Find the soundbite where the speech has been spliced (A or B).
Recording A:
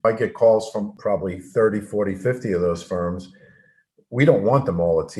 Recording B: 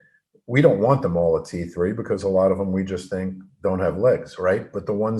A